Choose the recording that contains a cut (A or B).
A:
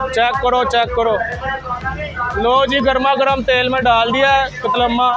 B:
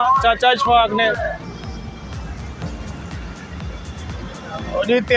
B